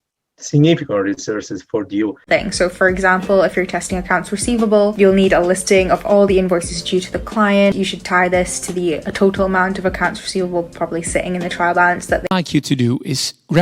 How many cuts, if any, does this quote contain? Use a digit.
2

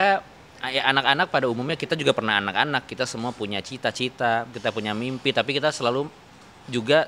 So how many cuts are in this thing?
0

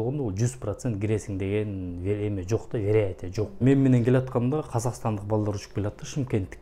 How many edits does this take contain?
1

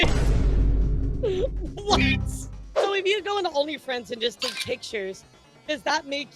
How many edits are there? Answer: 1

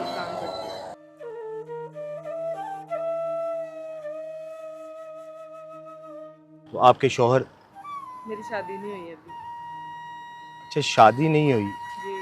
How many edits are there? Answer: 1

